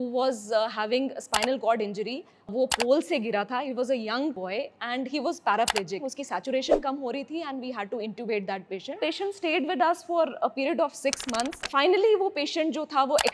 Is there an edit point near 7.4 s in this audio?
no; 5 cuts; at 2.5 s, 4.4 s, 6.1 s, 9.0 s, 11.6 s

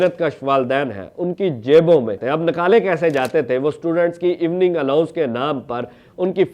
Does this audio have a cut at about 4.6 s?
no; 1 cut; at 2.1 s

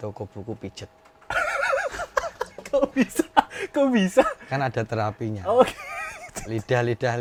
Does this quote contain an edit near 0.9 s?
no; 0 cuts

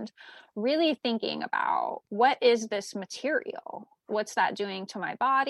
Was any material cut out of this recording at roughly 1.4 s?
no; 1 cut; at 4.0 s

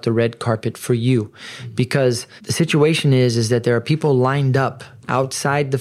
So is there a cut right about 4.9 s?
no; 1 cut; at 2.4 s

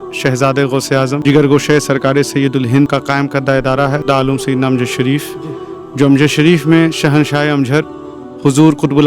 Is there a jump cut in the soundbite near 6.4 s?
no; 2 cuts; at 1.2 s, 2.9 s

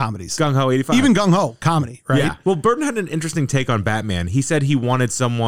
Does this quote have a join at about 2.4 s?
yes; 1 cut; at 2.4 s

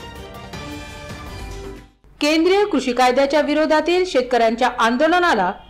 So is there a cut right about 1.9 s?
yes; 1 cut; at 1.9 s

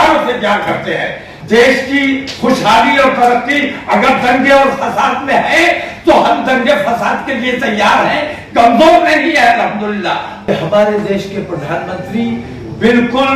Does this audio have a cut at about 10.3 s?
yes; 2 cuts; at 1.3 s, 10.3 s

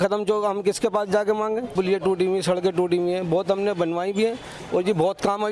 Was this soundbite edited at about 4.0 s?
no; 1 cut; at 1.7 s

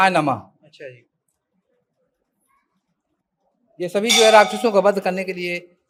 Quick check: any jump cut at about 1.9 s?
no; 0 cuts

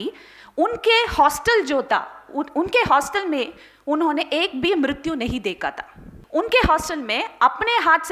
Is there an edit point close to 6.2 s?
yes; 1 cut; at 6.2 s

